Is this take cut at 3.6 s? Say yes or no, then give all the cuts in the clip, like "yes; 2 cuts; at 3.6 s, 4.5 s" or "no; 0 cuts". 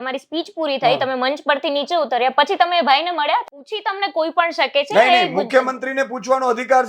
yes; 1 cut; at 3.6 s